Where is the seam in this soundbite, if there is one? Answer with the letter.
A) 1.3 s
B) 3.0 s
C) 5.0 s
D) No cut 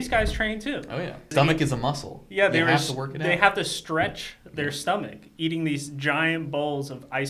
A